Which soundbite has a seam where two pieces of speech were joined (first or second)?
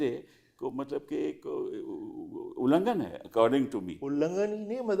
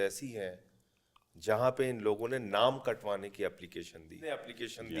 second